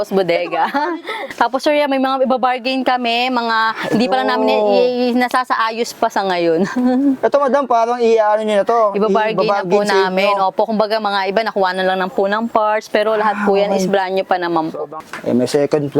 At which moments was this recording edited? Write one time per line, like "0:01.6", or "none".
0:01.1
0:14.9